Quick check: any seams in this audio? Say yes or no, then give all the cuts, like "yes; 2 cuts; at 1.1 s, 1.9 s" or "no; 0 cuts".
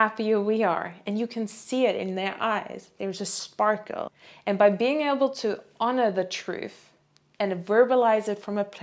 yes; 1 cut; at 4.2 s